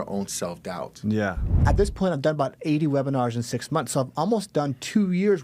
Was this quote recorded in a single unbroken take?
no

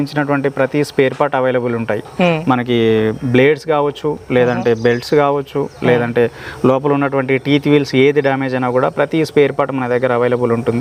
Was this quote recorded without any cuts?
yes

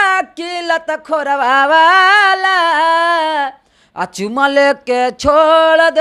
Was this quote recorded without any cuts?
yes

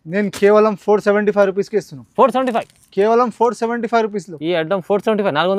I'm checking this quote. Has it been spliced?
no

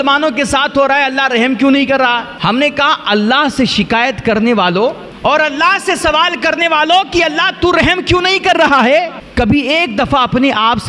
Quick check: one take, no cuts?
no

